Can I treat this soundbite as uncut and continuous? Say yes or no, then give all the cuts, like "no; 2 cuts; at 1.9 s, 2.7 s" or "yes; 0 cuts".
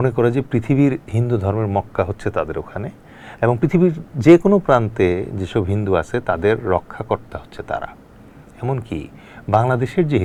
yes; 0 cuts